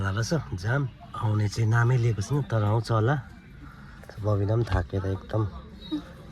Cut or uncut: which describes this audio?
uncut